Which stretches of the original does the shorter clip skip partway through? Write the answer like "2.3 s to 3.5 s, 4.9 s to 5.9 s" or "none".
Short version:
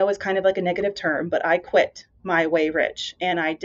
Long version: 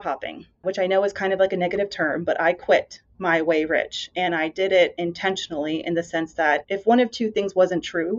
none

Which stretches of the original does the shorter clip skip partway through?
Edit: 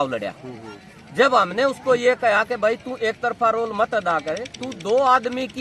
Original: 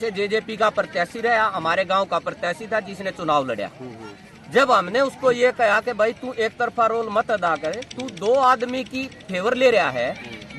none

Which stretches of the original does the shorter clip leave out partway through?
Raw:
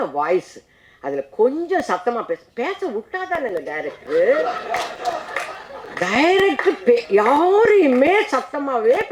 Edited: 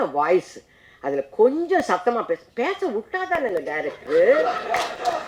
none

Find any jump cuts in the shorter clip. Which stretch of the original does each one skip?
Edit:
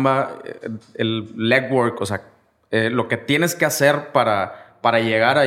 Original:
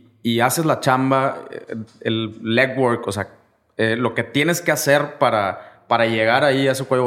none

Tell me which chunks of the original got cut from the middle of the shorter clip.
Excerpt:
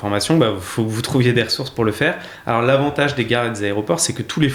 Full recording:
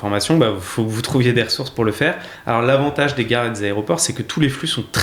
none

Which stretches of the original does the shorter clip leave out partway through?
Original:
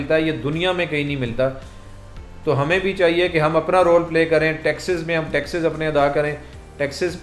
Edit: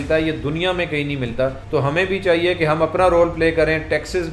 1.6 s to 2.3 s

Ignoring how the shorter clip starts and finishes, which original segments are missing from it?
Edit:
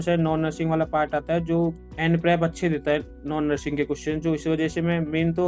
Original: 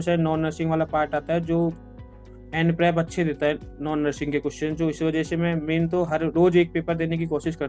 1.9 s to 2.4 s

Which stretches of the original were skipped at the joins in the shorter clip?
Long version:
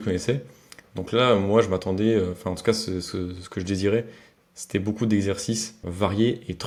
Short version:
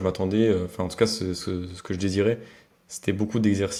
none

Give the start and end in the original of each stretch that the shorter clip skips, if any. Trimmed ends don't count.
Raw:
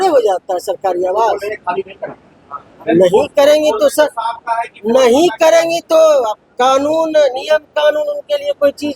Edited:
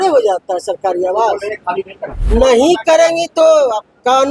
2.2 s to 4.7 s

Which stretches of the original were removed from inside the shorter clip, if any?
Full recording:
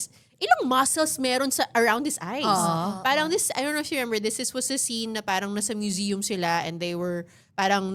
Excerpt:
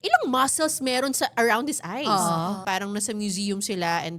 3.0 s to 5.2 s

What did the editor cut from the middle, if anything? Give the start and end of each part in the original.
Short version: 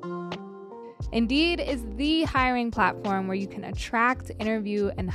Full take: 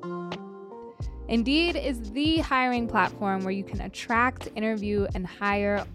1.0 s to 1.2 s

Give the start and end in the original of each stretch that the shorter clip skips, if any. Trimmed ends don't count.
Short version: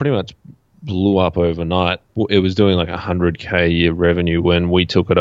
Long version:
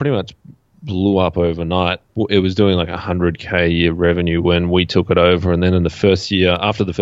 none

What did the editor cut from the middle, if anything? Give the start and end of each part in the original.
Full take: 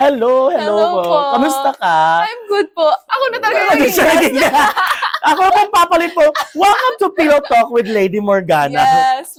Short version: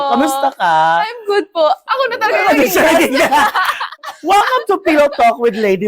5.2 s to 6.3 s

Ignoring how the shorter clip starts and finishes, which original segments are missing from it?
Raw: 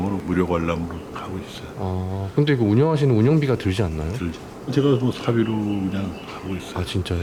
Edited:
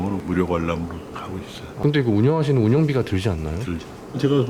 1.7 s to 2.3 s

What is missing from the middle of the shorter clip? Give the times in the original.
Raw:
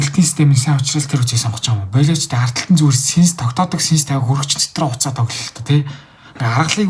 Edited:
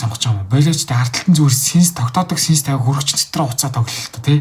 none

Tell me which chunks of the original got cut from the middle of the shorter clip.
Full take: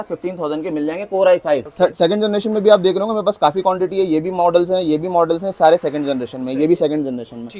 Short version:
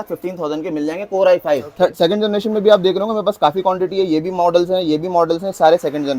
none

